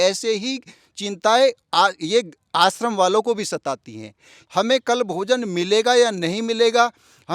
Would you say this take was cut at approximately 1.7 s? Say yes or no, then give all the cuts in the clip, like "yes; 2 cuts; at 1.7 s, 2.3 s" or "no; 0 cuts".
no; 1 cut; at 4.3 s